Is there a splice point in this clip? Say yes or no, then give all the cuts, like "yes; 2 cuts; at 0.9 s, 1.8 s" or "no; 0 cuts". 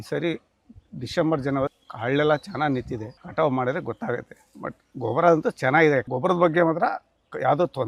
yes; 2 cuts; at 1.7 s, 3.2 s